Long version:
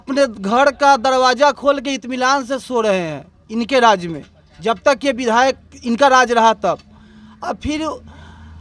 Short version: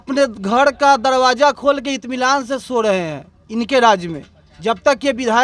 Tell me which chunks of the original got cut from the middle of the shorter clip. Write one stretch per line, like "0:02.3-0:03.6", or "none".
none